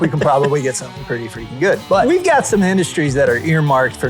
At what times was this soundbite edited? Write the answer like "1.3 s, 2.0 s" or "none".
2.0 s